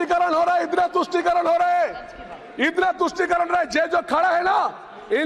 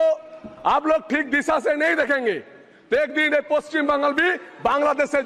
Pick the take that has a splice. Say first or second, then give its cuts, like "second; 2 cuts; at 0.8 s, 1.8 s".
first; 1 cut; at 1.8 s